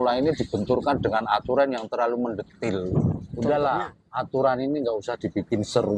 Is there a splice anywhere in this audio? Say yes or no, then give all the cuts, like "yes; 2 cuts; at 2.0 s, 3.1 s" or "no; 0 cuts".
yes; 1 cut; at 3.3 s